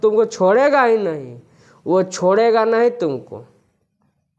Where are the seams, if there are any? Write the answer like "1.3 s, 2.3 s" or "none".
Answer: none